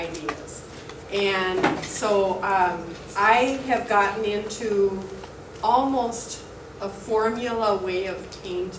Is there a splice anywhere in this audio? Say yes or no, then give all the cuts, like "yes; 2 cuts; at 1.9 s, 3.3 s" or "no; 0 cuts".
no; 0 cuts